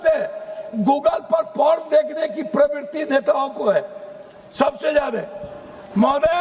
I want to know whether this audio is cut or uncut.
uncut